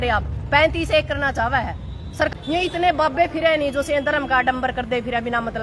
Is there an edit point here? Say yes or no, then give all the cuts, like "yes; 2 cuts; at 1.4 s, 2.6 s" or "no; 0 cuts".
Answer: yes; 1 cut; at 2.3 s